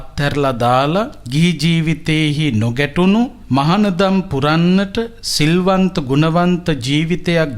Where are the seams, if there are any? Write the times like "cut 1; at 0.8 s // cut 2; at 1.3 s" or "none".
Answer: cut 1; at 1.2 s // cut 2; at 3.4 s